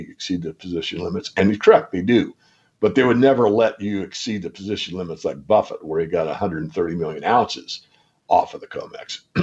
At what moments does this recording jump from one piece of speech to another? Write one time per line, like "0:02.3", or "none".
none